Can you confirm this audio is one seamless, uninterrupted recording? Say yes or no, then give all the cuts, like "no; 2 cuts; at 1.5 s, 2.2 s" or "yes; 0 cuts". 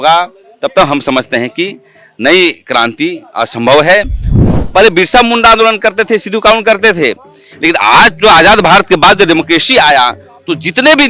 no; 1 cut; at 4.3 s